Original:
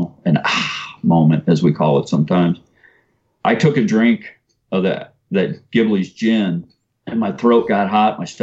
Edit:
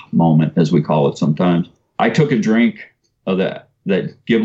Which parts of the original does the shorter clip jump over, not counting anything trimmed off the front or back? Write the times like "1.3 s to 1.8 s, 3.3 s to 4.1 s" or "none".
2.7 s to 3.2 s

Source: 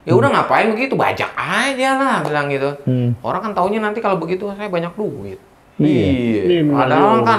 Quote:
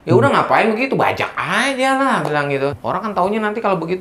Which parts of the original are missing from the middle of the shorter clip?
2.8 s to 3.2 s

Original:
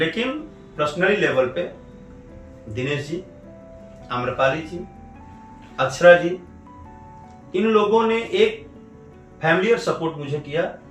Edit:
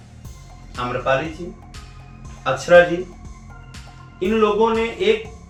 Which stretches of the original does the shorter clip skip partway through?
none

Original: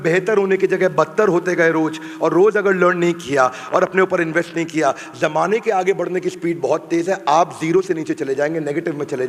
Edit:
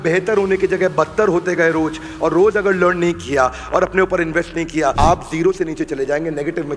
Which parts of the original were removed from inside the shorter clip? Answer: 4.9 s to 7.2 s

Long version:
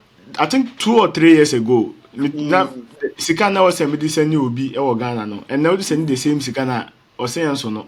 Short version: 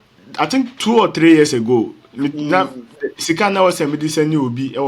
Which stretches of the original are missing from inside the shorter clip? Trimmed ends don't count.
none

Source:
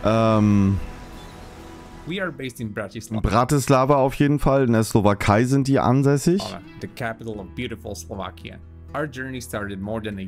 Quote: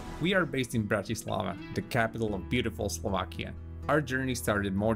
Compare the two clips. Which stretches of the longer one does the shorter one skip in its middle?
3.2 s to 6.4 s

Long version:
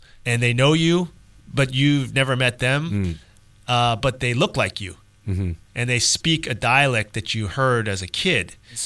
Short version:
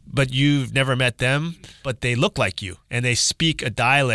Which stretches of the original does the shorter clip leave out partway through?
3.3 s to 4.1 s, 5.0 s to 5.6 s

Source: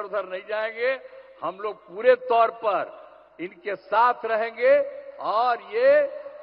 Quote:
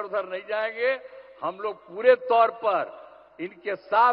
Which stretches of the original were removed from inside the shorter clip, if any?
none

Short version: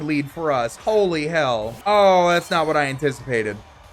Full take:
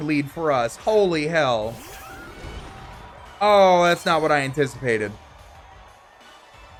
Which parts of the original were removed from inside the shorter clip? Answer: 1.7 s to 3.3 s

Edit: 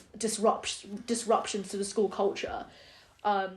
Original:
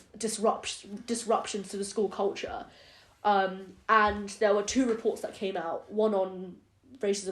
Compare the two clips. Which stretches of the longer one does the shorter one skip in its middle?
none

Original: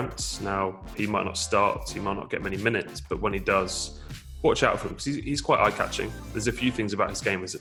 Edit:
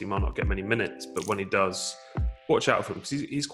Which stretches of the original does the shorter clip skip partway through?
none

